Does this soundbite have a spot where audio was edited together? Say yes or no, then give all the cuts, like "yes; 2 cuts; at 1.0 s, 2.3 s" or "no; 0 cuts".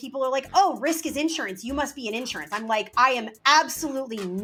no; 0 cuts